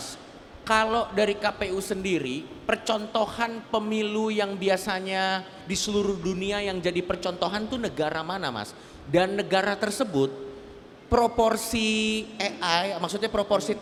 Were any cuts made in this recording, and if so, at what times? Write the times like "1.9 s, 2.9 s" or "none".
none